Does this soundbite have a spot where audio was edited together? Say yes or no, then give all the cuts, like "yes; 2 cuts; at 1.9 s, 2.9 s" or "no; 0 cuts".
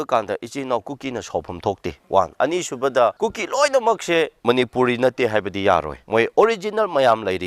yes; 4 cuts; at 1.9 s, 3.2 s, 4.4 s, 6.0 s